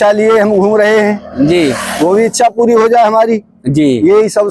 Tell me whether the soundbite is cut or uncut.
uncut